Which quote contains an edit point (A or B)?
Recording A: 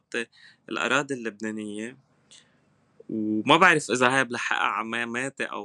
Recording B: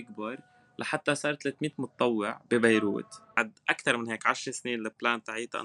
B